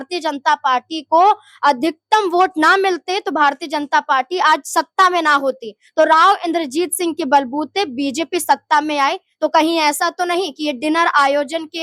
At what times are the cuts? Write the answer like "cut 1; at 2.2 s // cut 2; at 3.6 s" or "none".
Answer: none